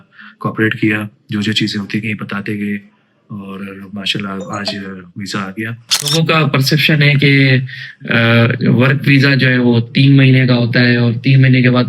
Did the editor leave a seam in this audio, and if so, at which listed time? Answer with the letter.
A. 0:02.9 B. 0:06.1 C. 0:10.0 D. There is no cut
B